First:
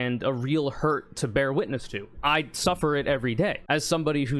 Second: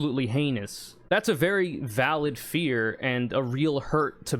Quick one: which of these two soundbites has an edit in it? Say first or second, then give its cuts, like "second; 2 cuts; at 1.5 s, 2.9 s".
second; 1 cut; at 1.0 s